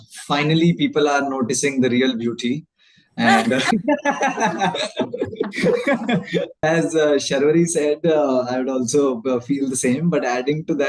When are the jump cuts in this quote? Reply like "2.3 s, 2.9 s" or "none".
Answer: 6.5 s